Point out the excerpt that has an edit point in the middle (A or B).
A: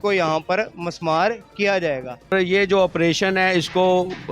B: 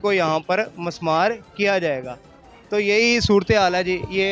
A